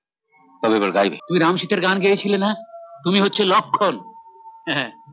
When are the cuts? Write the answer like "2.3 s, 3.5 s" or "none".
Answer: 1.2 s